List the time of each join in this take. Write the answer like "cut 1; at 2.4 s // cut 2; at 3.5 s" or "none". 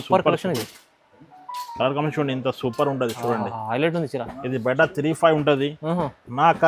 none

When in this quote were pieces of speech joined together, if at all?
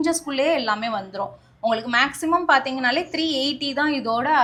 none

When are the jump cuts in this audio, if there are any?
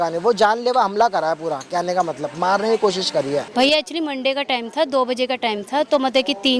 cut 1; at 3.5 s

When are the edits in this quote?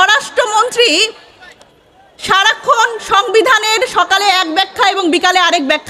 none

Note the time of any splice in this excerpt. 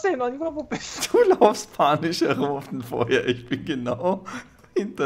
none

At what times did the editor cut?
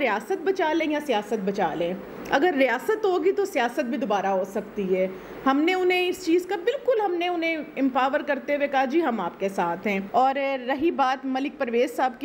none

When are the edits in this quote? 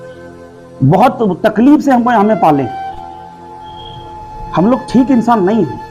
cut 1; at 2.8 s // cut 2; at 4.3 s

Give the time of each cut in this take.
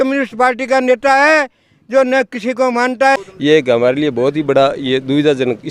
cut 1; at 3.2 s

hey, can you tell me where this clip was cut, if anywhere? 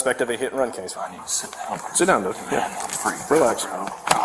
cut 1; at 1.0 s

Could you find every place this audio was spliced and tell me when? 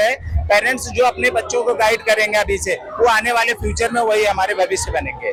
none

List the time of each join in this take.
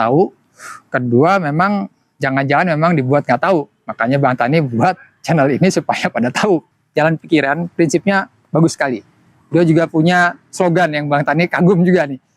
cut 1; at 6.7 s

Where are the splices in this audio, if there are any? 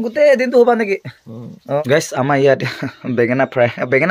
cut 1; at 1.8 s

